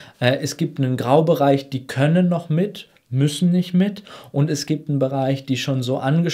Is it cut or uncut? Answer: uncut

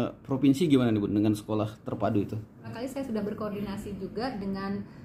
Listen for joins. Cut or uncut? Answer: cut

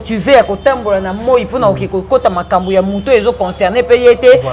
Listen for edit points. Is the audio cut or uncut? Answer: uncut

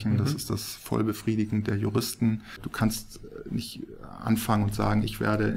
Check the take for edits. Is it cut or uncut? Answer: cut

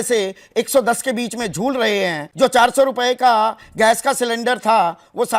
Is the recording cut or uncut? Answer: uncut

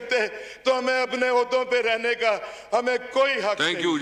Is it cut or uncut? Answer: uncut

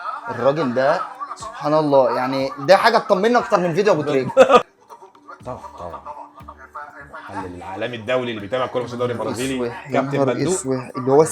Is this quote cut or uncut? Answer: cut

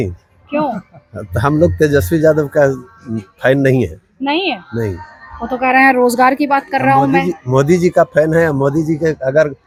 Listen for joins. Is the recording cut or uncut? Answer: uncut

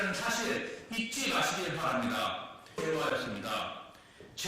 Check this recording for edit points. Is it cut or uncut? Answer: cut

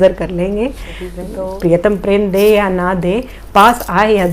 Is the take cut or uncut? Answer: cut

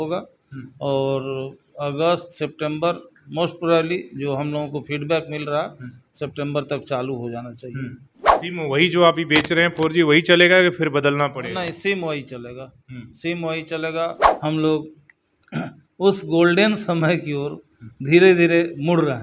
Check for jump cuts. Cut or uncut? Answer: cut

